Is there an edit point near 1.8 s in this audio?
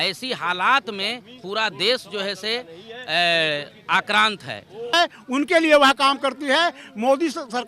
no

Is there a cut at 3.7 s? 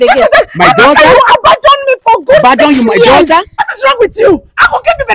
yes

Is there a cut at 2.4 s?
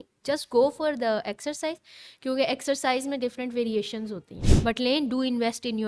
no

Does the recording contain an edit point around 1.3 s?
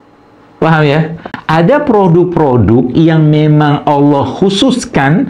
yes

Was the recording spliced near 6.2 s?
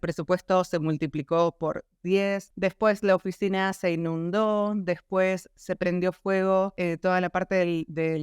no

